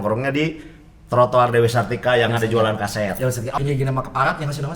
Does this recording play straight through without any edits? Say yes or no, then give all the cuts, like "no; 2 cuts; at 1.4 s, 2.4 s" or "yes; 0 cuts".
no; 1 cut; at 3.5 s